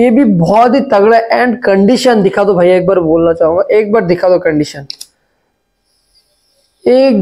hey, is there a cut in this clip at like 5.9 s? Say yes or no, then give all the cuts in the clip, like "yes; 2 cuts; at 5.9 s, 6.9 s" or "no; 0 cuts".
no; 0 cuts